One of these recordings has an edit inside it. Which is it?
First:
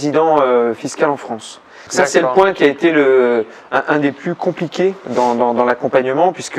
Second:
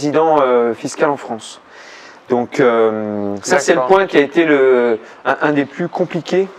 first; 1 cut; at 1.8 s

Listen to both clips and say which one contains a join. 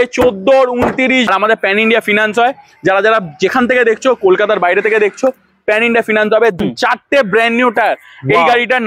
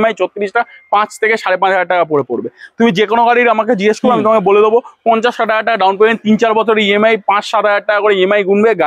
first; 2 cuts; at 1.0 s, 6.6 s

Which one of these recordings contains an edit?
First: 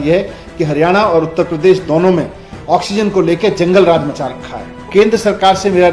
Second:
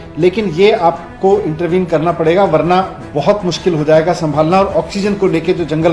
first; 1 cut; at 4.9 s

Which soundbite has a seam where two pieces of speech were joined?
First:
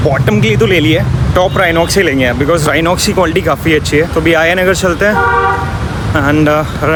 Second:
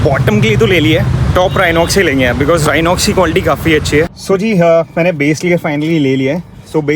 second; 1 cut; at 4.1 s

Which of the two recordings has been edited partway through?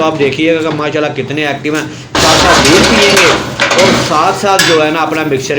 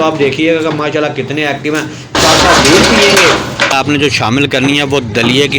second; 1 cut; at 3.7 s

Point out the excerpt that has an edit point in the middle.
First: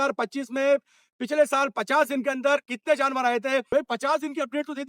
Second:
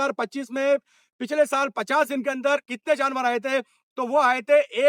first; 1 cut; at 3.7 s

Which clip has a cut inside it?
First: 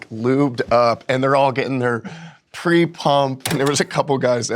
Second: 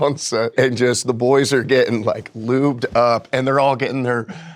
first; 1 cut; at 3.5 s

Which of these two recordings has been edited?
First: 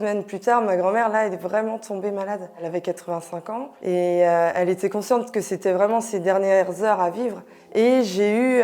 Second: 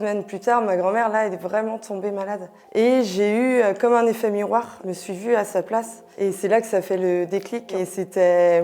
second; 3 cuts; at 2.5 s, 4.8 s, 7.6 s

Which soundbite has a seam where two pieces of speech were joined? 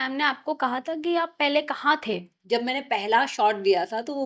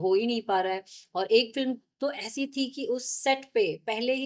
first; 1 cut; at 2.3 s

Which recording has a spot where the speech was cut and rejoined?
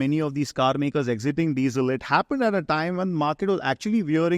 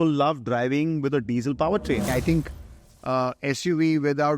second; 1 cut; at 2.1 s

